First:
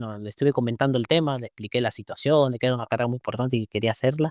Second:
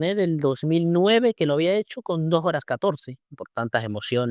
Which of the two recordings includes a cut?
second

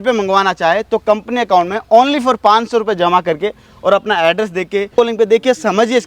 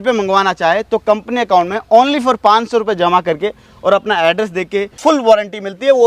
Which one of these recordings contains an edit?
second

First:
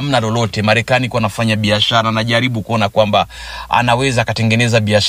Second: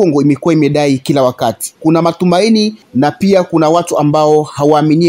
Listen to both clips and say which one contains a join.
second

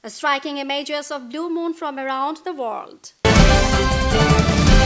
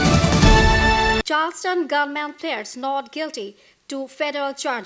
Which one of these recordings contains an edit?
second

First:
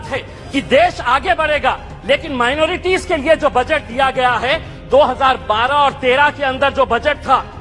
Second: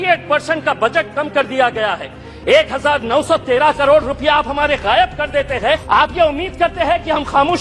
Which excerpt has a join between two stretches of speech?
second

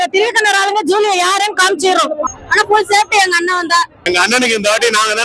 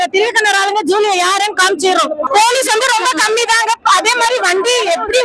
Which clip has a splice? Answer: first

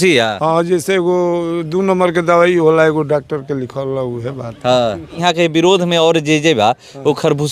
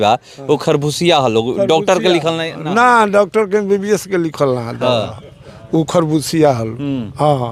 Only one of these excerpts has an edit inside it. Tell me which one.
first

